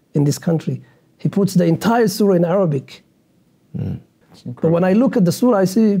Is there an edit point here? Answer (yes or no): yes